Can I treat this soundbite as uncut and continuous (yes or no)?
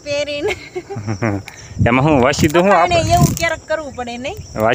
yes